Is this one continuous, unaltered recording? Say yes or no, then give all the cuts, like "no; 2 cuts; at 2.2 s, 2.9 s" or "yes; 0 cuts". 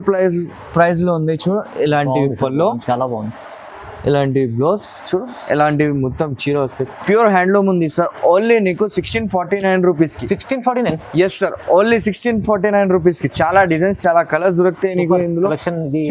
yes; 0 cuts